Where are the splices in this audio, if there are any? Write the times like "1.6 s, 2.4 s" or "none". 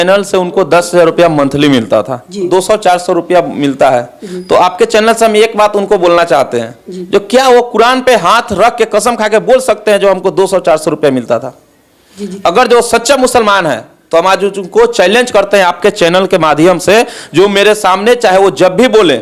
2.5 s